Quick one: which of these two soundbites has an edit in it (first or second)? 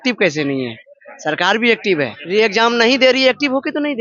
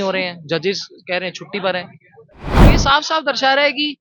first